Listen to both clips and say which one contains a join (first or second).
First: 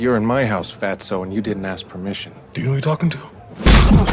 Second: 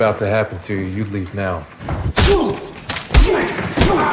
first